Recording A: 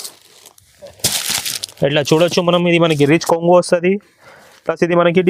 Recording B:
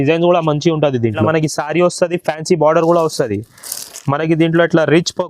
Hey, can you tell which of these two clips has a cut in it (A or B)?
B